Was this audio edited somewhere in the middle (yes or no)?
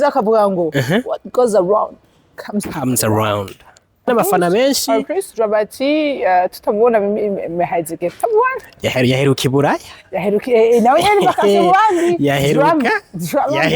yes